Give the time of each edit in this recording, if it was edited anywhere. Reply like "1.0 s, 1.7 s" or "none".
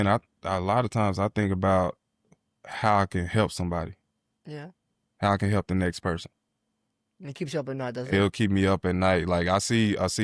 none